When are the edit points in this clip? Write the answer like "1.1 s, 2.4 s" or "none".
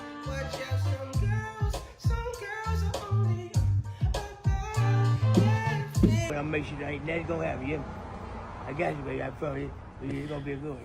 6.3 s

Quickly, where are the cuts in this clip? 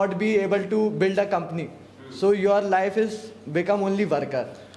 none

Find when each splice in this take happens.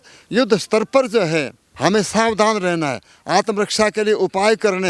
1.6 s

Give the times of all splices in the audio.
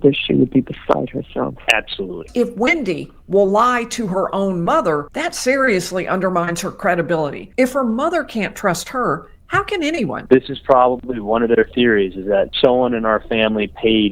2.2 s, 5.2 s, 7.4 s, 10.2 s

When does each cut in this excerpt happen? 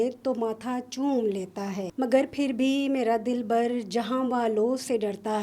1.9 s

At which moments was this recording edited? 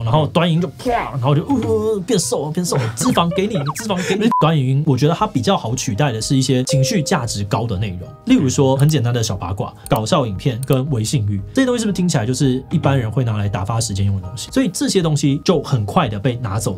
4.4 s, 9.8 s, 14.4 s

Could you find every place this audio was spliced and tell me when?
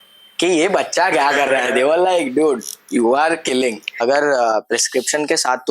4.0 s

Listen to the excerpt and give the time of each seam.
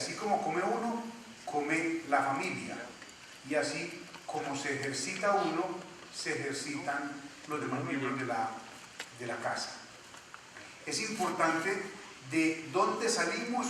4.4 s

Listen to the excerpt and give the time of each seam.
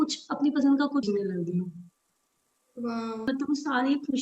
1.0 s, 3.3 s

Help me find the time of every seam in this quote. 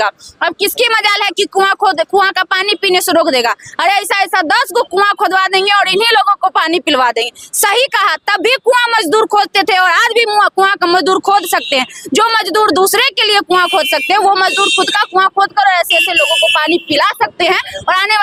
none

